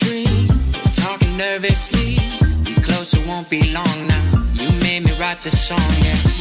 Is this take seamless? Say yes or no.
yes